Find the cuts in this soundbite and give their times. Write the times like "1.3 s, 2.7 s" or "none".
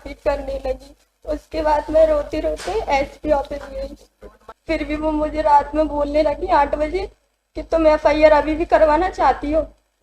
4.5 s